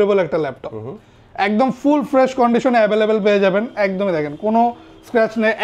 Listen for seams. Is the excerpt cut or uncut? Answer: uncut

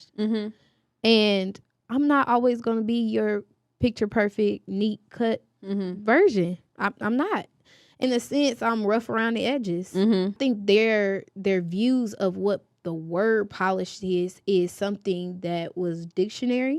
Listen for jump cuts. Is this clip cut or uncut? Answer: cut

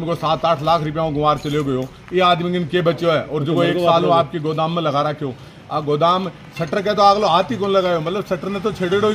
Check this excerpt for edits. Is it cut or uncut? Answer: uncut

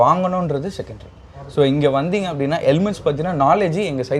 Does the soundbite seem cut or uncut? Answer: uncut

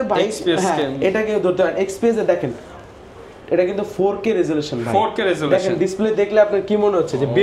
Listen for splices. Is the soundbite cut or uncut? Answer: uncut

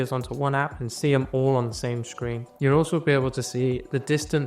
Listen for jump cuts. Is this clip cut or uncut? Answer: cut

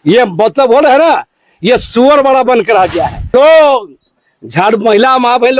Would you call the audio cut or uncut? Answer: cut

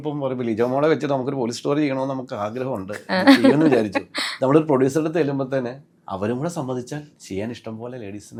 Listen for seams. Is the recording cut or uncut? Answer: uncut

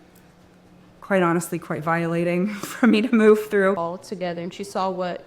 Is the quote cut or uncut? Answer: cut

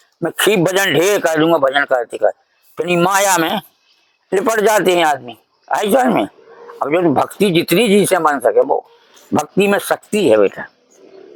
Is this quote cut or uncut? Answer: uncut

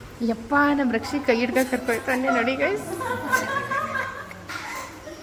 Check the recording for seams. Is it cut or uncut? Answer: uncut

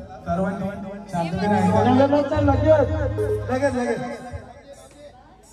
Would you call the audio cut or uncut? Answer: uncut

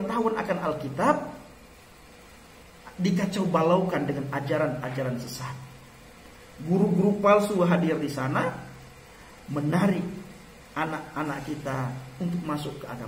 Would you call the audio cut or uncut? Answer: uncut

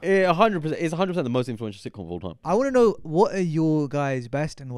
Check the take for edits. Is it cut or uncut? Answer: cut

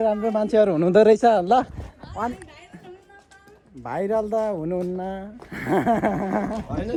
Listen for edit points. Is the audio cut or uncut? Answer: uncut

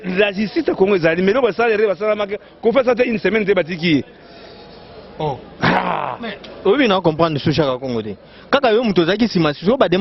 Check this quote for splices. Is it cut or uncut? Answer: uncut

